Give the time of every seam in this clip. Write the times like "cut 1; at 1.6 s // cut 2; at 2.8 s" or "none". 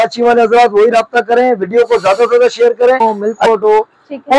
cut 1; at 3.0 s

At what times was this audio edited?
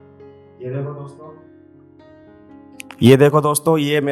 cut 1; at 1.3 s // cut 2; at 3.0 s

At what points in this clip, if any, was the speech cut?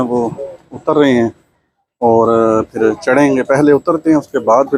none

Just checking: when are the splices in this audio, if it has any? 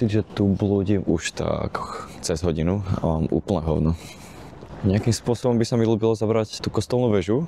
none

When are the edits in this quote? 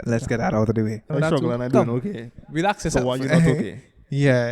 cut 1; at 1.1 s

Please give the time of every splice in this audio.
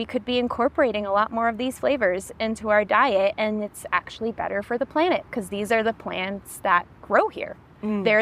none

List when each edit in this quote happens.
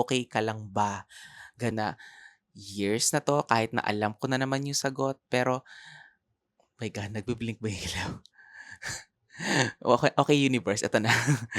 cut 1; at 1.7 s

